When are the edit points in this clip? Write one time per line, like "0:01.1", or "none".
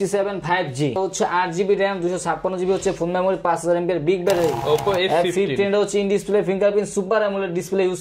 0:01.0
0:04.6

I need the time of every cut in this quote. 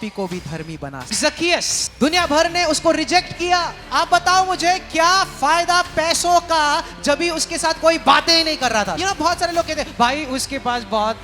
0:01.3
0:03.8
0:09.0

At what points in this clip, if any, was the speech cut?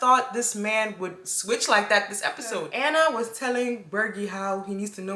0:02.8

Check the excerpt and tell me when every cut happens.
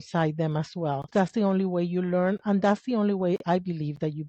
0:01.1

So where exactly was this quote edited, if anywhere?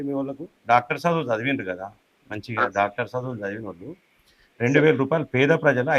none

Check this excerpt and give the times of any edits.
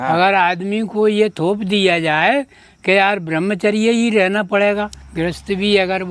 0:05.0

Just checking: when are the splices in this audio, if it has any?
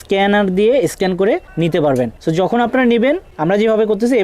0:01.5
0:02.2
0:03.3

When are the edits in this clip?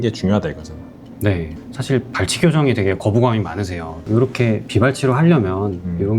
0:03.9

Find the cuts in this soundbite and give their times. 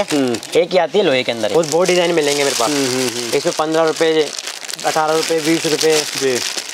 0:01.5

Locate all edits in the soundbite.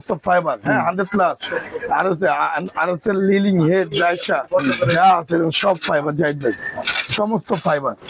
none

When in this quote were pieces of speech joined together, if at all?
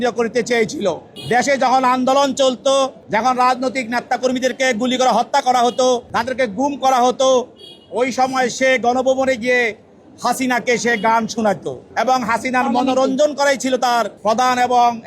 0:01.1
0:03.0
0:06.1
0:11.8
0:14.1

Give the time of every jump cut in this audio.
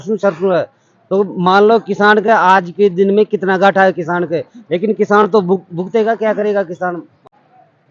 none

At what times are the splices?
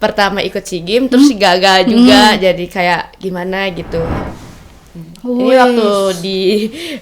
0:04.2

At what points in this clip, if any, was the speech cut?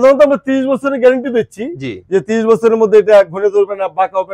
none

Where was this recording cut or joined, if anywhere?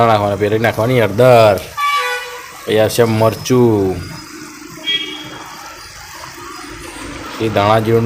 none

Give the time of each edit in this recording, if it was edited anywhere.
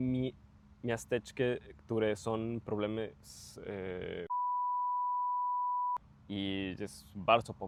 none

